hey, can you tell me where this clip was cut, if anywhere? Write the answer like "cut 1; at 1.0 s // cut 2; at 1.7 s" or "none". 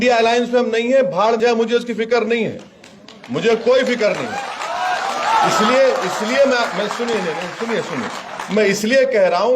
cut 1; at 1.4 s